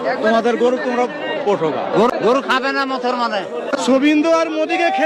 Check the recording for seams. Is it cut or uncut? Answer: uncut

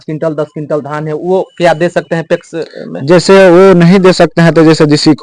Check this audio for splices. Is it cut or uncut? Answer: uncut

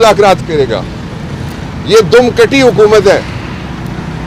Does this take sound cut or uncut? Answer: uncut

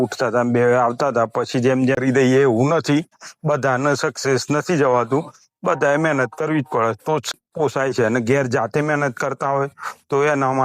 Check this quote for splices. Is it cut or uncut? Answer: cut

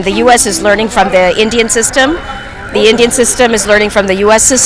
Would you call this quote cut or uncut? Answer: uncut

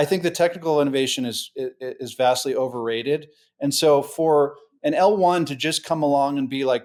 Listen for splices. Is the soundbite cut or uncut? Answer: uncut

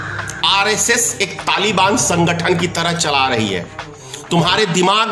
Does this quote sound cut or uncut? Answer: uncut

